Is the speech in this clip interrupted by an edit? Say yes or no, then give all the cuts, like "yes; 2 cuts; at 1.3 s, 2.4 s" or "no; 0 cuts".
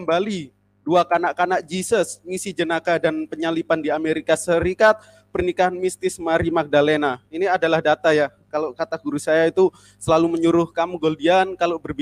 no; 0 cuts